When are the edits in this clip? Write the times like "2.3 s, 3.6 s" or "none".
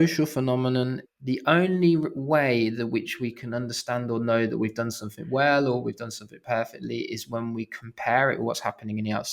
1.1 s